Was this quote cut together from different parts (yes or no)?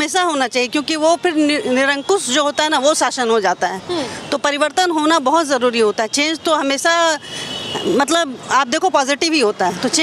no